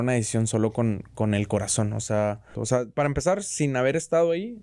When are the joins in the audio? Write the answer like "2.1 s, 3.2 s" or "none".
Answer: 2.6 s